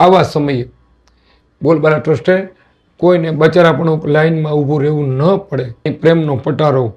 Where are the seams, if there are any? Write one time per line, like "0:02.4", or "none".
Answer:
0:05.9